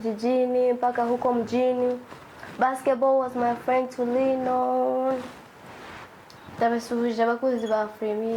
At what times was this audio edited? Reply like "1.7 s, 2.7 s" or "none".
none